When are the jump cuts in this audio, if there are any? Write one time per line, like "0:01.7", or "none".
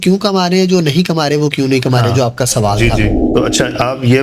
0:03.2